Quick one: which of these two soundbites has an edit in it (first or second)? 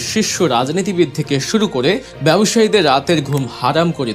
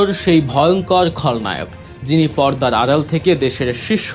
first